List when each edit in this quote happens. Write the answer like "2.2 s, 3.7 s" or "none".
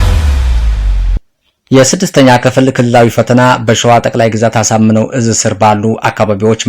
1.2 s